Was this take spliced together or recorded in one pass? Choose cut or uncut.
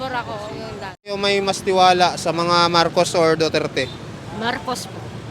cut